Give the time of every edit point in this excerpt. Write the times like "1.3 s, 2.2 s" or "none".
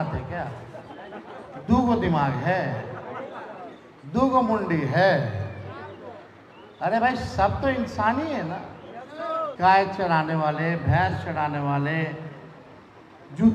9.5 s